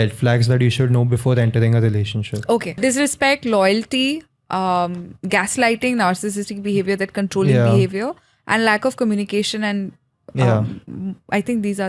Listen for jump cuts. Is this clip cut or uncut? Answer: cut